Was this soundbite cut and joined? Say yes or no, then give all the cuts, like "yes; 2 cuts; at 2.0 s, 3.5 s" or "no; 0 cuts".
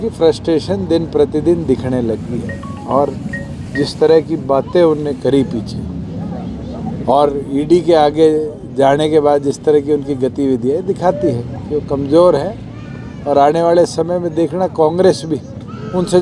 no; 0 cuts